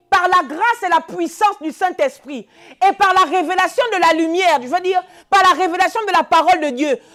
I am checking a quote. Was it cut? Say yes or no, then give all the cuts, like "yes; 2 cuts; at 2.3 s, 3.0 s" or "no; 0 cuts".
no; 0 cuts